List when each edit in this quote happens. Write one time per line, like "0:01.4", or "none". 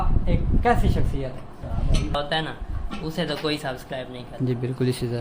0:02.1